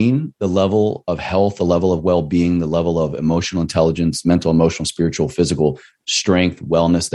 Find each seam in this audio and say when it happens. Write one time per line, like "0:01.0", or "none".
none